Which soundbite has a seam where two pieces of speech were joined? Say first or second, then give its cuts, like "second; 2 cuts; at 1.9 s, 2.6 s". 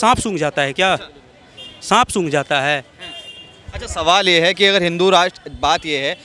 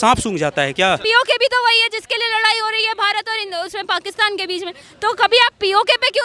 second; 1 cut; at 1.0 s